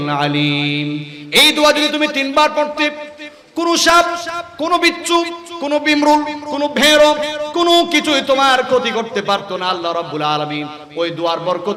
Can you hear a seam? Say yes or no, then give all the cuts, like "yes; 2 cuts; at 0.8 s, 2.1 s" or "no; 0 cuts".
no; 0 cuts